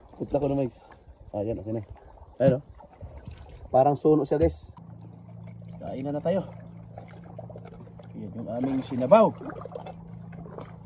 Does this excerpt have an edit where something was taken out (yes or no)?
yes